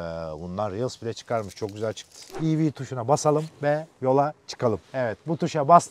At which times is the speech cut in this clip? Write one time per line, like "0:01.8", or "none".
0:02.3